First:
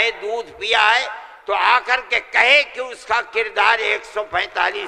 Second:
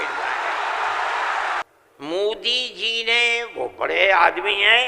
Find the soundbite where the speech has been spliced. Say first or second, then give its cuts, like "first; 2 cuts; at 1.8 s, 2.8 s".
second; 1 cut; at 1.6 s